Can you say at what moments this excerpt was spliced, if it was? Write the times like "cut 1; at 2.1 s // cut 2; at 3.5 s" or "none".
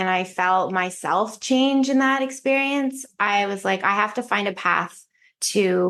none